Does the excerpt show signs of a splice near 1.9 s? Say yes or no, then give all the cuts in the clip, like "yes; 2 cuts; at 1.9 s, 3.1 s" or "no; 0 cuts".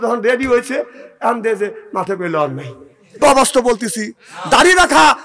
no; 1 cut; at 3.2 s